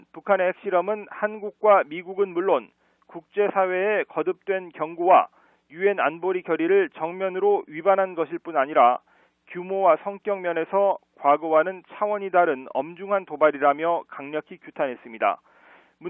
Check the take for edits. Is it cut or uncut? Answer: cut